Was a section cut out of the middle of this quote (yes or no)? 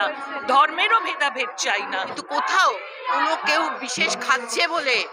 yes